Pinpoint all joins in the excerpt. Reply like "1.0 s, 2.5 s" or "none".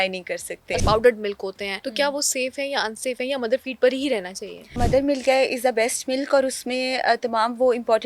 0.8 s, 1.7 s, 4.8 s